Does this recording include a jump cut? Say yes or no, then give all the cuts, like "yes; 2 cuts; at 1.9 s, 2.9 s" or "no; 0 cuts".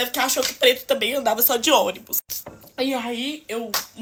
no; 0 cuts